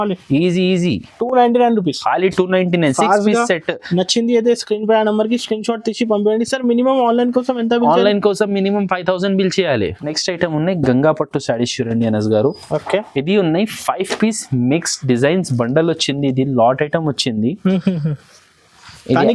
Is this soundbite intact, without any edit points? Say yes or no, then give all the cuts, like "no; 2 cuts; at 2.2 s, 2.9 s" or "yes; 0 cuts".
yes; 0 cuts